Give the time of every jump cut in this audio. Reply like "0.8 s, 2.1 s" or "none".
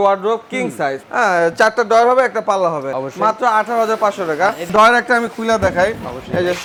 none